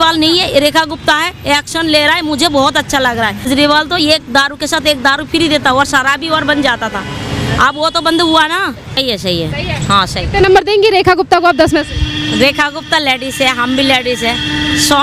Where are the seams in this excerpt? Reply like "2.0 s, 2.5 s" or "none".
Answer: 3.5 s, 9.0 s